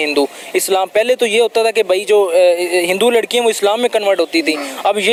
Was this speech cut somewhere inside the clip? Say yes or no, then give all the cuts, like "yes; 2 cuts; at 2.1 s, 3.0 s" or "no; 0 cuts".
no; 0 cuts